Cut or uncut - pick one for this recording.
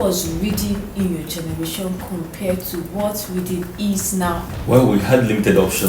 cut